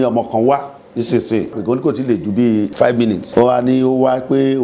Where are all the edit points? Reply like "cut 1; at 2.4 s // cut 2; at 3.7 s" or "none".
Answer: cut 1; at 2.7 s